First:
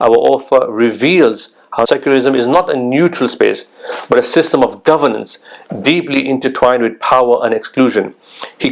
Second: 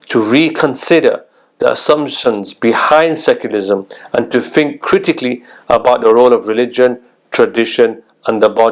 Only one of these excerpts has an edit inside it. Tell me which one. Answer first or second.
first